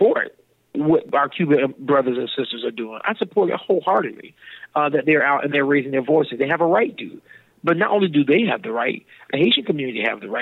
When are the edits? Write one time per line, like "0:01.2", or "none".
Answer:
0:01.1